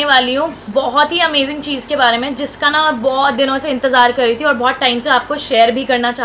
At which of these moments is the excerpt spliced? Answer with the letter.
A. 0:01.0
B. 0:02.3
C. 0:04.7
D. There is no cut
D